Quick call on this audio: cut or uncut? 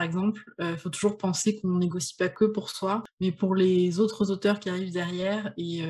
cut